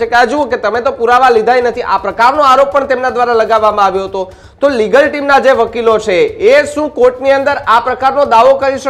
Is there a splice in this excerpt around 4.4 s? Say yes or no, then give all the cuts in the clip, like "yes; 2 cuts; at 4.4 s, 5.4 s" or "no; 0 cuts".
no; 0 cuts